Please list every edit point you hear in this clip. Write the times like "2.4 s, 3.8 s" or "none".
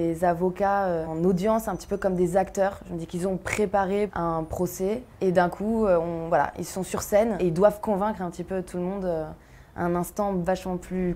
1.1 s, 4.1 s, 5.1 s